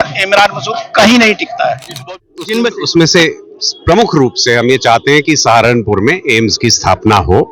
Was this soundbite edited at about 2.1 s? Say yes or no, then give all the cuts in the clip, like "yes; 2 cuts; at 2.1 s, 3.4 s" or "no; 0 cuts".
yes; 1 cut; at 2.1 s